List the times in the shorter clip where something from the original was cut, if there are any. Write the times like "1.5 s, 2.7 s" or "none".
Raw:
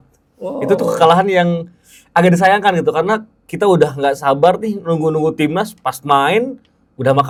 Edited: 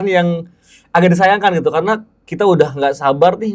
none